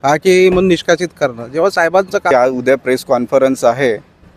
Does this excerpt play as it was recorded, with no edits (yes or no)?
no